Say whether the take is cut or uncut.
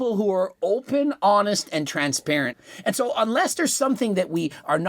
cut